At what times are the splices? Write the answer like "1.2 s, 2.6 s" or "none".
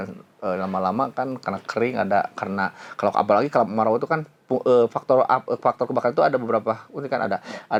none